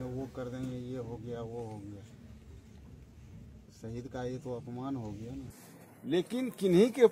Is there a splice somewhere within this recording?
yes; 1 cut; at 5.9 s

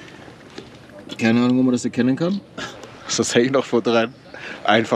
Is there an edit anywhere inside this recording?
no; 0 cuts

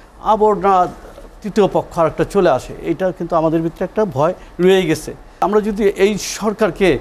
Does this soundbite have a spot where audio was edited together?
yes; 1 cut; at 5.4 s

